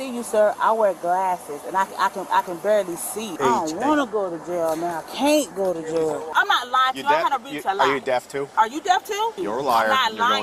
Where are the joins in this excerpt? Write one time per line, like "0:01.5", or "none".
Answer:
0:03.2
0:06.2
0:08.5
0:09.4